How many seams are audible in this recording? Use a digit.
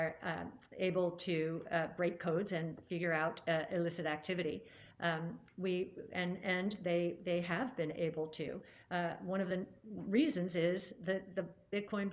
0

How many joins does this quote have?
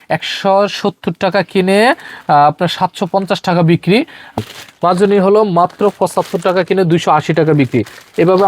1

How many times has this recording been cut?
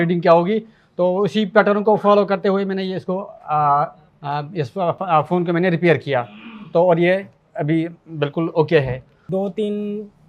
2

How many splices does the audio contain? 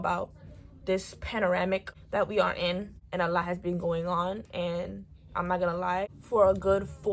3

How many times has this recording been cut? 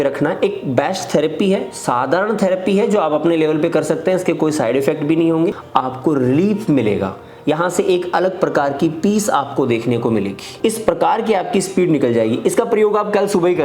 2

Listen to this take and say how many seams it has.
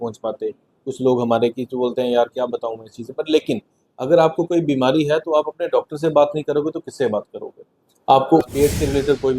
1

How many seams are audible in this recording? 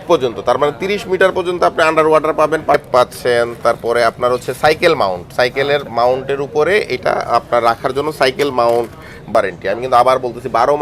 2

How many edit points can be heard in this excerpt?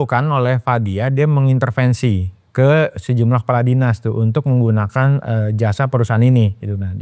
0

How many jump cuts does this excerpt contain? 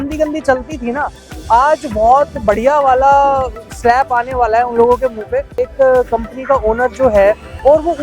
1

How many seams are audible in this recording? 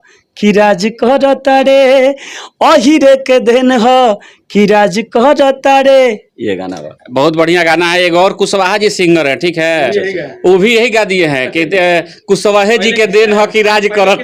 0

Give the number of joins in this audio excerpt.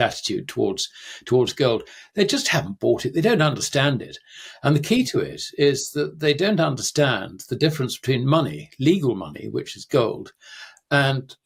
0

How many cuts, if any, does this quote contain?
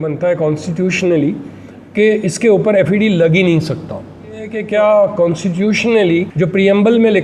2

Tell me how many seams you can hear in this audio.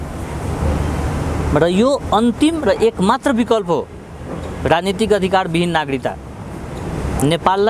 0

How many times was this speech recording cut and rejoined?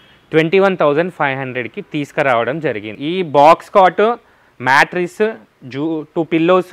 1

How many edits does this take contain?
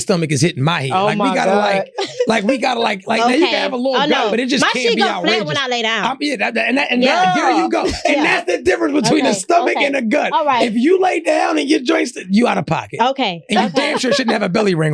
0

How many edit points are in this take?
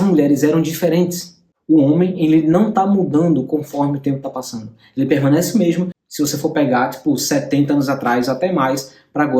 1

